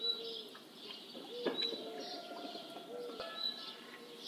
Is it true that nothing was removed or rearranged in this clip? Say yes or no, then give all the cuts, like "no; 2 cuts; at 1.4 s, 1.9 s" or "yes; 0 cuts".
no; 1 cut; at 3.2 s